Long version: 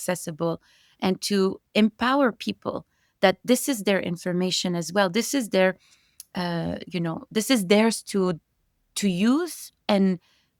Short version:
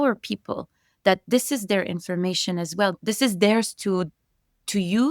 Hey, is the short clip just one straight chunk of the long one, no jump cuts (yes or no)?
no